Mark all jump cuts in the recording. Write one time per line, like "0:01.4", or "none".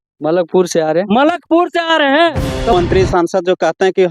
0:02.7